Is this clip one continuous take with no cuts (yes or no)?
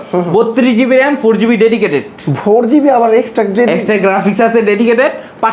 yes